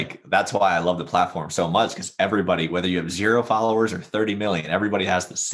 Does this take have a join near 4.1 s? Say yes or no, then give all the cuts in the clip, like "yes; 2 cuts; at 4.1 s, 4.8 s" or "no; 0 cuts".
no; 0 cuts